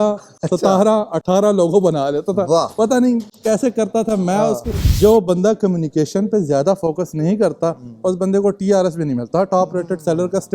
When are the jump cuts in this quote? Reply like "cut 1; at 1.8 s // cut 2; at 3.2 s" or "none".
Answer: cut 1; at 4.9 s